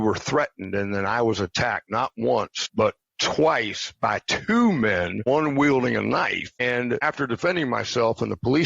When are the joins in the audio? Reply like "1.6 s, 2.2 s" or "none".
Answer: 2.6 s, 5.3 s, 7.0 s